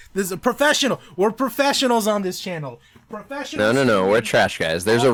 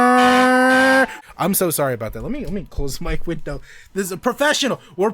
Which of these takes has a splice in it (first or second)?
second